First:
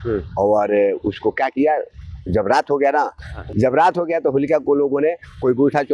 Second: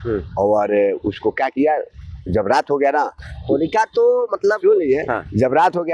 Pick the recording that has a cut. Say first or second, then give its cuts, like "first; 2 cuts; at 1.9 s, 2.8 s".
first; 1 cut; at 3.4 s